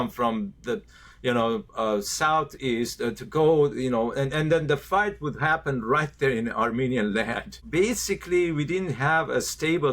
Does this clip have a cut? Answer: yes; 1 cut; at 7.6 s

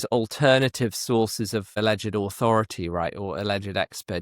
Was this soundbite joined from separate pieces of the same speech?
yes; 1 cut; at 1.7 s

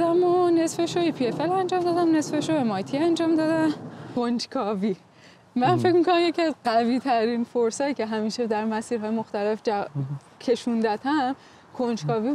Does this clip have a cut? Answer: yes; 1 cut; at 4.1 s

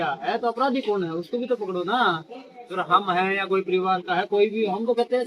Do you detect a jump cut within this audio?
no; 0 cuts

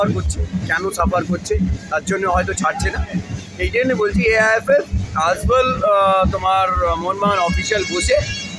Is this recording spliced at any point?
no; 0 cuts

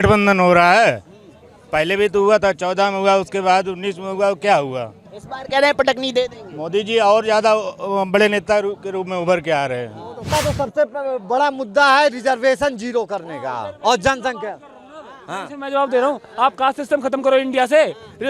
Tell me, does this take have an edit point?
yes; 1 cut; at 10.2 s

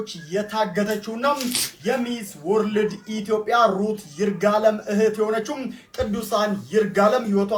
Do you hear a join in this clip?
no; 0 cuts

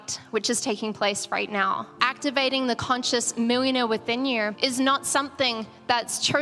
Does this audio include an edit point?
yes; 2 cuts; at 1.9 s, 4.5 s

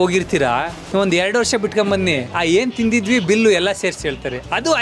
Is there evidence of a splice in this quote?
yes; 1 cut; at 2.3 s

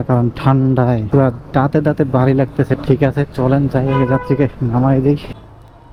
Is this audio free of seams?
yes; 0 cuts

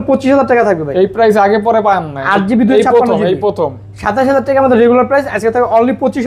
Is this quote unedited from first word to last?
yes; 0 cuts

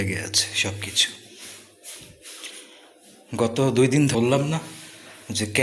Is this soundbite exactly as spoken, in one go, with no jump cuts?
no; 1 cut; at 4.1 s

